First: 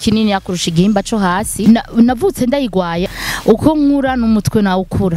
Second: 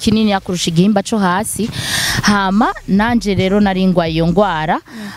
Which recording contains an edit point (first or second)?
first